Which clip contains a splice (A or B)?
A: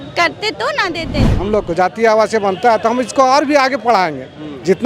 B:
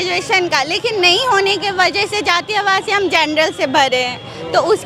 A